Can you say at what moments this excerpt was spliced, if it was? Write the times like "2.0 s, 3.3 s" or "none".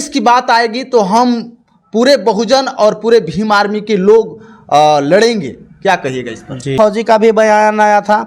6.7 s